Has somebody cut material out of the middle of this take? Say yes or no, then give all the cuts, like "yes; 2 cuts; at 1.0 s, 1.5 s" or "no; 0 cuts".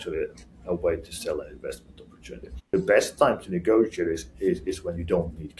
yes; 1 cut; at 2.7 s